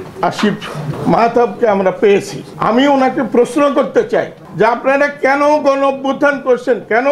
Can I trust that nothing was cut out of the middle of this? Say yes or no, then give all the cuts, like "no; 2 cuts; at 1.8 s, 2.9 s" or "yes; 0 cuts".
no; 3 cuts; at 0.9 s, 2.4 s, 4.4 s